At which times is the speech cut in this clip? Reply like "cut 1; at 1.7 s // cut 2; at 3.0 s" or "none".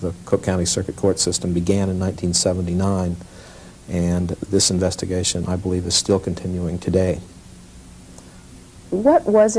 none